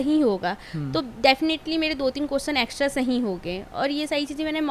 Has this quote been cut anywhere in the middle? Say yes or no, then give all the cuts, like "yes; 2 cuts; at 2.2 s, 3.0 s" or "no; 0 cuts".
no; 0 cuts